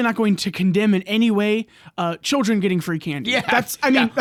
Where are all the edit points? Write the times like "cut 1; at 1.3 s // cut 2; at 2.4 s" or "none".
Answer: none